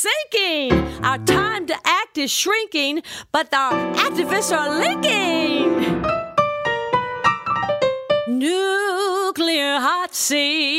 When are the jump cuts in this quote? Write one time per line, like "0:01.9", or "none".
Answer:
none